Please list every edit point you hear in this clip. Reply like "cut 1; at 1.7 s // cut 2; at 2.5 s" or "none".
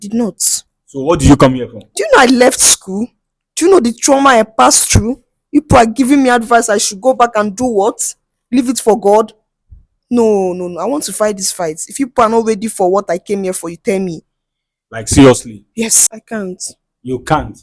cut 1; at 16.1 s